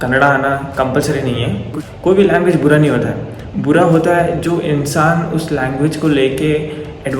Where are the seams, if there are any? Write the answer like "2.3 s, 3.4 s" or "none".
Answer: 1.7 s